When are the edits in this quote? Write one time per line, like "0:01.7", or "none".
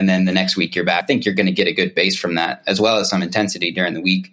0:01.0